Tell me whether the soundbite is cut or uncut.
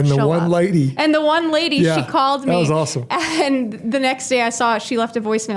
uncut